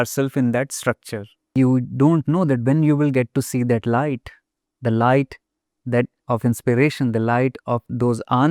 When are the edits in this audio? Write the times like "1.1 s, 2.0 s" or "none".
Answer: 1.6 s